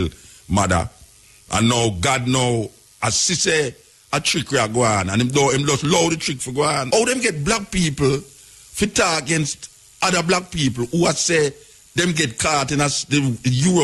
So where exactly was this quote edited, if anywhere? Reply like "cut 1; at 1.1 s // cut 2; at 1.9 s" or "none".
cut 1; at 6.9 s